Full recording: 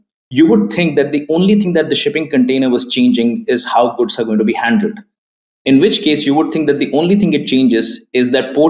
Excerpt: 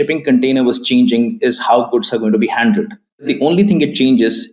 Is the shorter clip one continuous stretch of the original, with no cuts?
no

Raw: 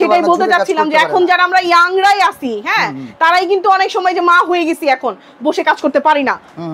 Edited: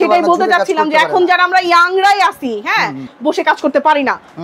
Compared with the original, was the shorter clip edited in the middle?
yes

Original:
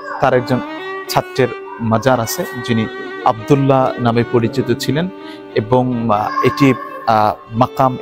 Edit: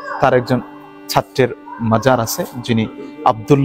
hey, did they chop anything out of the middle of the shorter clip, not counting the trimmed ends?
no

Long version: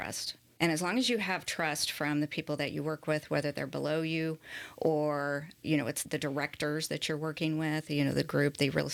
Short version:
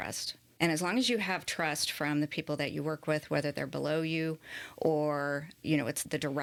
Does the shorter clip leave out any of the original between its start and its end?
no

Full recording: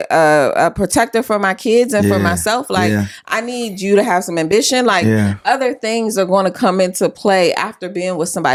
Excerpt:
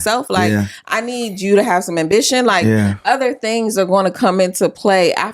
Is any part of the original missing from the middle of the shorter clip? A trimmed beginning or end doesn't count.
no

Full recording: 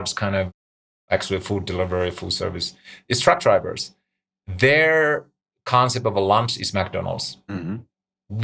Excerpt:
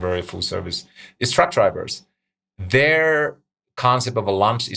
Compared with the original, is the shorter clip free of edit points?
yes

